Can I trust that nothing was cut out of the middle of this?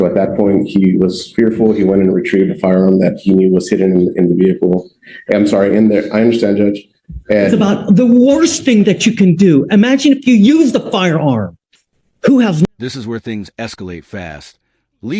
yes; 0 cuts

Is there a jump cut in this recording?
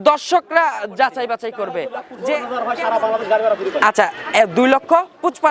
yes; 1 cut; at 2.4 s

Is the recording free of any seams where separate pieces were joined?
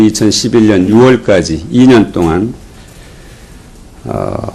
yes; 0 cuts

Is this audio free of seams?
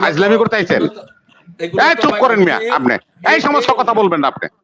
yes; 0 cuts

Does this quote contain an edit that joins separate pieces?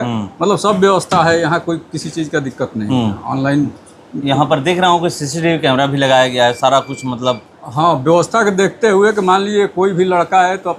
no; 0 cuts

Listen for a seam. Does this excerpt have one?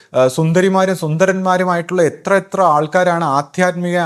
no; 0 cuts

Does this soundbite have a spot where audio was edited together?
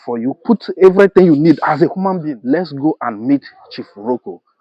yes; 1 cut; at 2.3 s

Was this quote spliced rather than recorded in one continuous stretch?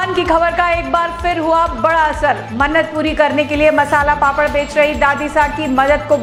no; 0 cuts

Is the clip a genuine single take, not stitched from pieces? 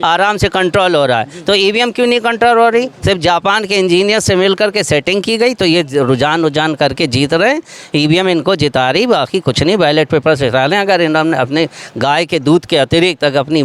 yes; 0 cuts

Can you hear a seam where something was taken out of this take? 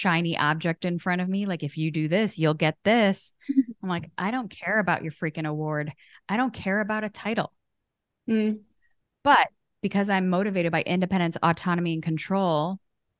no; 0 cuts

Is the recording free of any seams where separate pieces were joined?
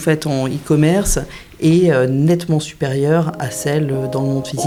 yes; 0 cuts

